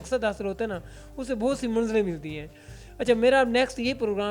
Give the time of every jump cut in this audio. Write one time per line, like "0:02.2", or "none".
none